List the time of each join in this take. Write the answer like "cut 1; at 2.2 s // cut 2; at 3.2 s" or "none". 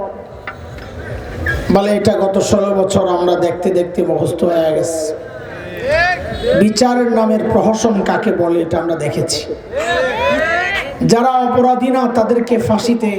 none